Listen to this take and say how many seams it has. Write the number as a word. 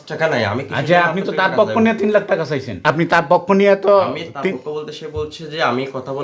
one